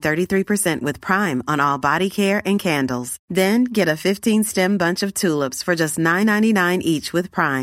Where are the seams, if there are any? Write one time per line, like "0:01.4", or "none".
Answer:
none